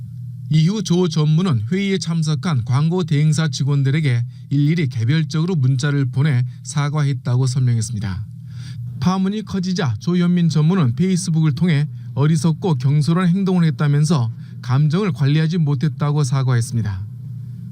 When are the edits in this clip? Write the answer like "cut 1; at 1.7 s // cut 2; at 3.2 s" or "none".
cut 1; at 13.9 s